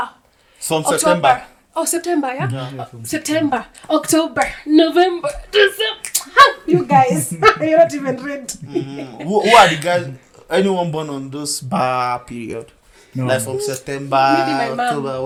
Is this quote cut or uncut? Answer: uncut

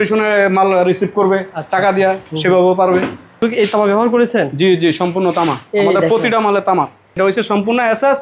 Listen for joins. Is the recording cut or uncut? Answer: cut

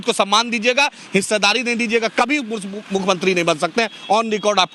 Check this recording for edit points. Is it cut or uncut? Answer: uncut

